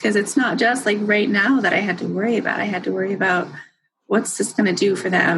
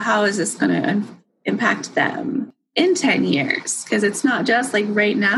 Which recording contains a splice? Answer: second; 1 cut; at 2.6 s

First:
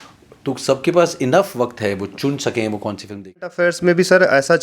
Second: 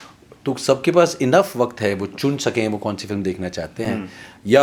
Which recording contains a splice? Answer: first; 1 cut; at 3.5 s

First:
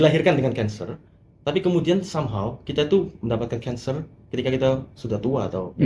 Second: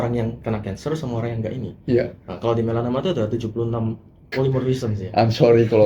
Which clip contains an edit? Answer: second; 1 cut; at 4.3 s

